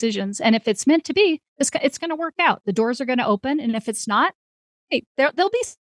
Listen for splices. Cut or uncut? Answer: uncut